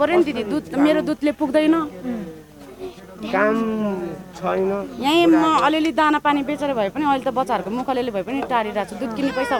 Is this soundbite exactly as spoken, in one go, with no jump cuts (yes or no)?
yes